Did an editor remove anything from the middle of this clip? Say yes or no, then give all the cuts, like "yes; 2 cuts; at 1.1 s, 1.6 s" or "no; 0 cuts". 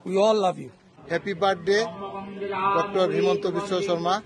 yes; 1 cut; at 0.9 s